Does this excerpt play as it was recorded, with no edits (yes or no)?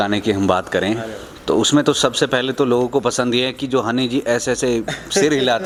yes